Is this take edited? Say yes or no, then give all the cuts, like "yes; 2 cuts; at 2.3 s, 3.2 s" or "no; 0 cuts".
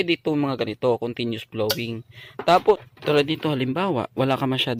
no; 0 cuts